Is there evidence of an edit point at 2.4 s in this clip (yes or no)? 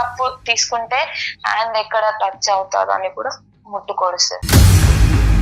no